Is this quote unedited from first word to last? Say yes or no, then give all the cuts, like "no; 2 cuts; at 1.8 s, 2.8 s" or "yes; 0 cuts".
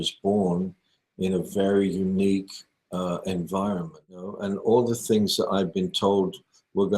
no; 1 cut; at 4.3 s